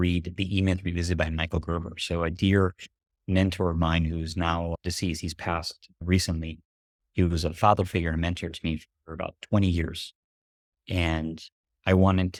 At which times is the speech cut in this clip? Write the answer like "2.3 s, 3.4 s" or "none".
none